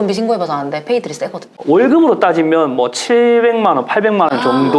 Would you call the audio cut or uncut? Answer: uncut